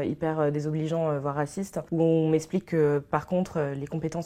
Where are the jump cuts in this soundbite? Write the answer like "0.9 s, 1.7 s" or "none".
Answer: 1.8 s